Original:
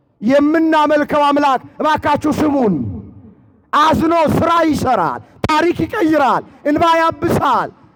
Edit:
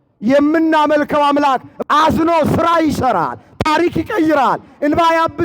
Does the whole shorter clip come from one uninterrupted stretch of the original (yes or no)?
no